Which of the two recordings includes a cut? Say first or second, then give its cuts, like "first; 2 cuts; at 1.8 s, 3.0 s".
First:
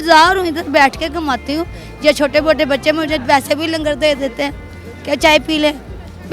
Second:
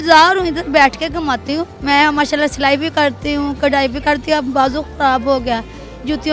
second; 1 cut; at 1.7 s